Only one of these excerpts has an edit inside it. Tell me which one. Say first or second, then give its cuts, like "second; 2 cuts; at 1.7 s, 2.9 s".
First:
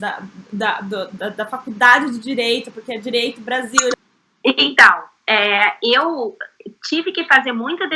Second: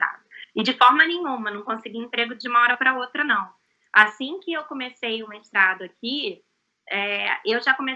first; 1 cut; at 3.9 s